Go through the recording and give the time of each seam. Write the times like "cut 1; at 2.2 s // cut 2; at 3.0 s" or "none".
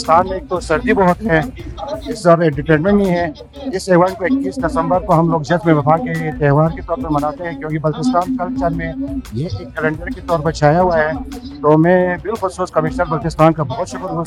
none